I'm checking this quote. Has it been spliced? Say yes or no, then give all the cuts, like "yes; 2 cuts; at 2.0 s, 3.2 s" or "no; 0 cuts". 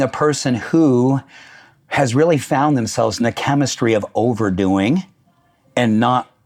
no; 0 cuts